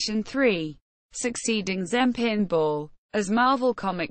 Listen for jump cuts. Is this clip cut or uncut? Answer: uncut